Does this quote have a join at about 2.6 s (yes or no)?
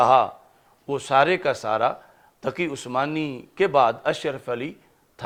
no